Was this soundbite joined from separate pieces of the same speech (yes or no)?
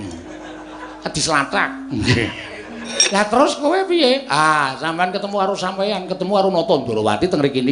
yes